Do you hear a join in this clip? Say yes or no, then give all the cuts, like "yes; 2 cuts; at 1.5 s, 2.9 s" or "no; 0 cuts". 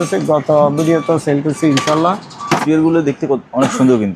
yes; 1 cut; at 2.6 s